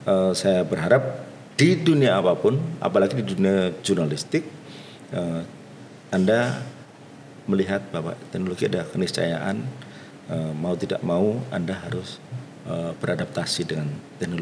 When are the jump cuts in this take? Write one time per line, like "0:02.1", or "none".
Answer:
none